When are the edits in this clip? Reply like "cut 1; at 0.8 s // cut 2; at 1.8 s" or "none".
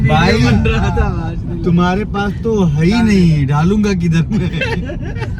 none